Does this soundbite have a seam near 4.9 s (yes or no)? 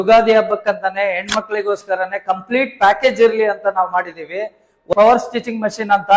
yes